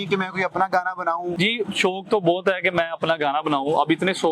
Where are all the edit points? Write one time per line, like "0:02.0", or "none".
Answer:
0:01.4